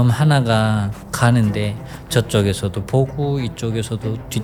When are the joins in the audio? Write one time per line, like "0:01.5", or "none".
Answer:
none